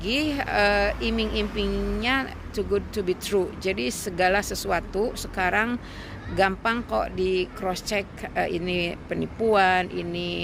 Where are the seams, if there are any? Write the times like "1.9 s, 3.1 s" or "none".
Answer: none